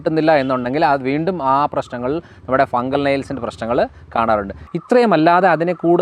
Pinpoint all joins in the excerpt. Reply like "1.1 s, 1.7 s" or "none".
4.6 s